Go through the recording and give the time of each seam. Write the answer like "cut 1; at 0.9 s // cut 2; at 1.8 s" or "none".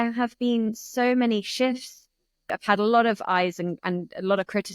cut 1; at 2.5 s